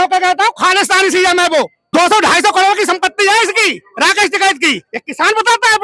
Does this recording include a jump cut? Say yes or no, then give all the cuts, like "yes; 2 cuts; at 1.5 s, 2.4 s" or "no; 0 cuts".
yes; 1 cut; at 1.8 s